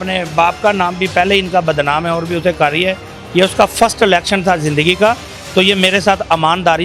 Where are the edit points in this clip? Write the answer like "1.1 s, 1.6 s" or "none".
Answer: none